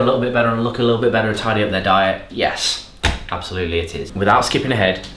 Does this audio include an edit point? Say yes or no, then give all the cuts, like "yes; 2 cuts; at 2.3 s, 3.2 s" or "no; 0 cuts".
yes; 1 cut; at 4.0 s